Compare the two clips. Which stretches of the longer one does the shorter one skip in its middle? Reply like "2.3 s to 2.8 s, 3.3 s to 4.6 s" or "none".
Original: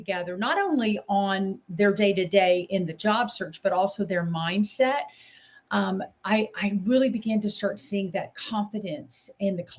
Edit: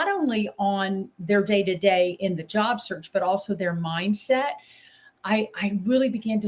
5.6 s to 6.1 s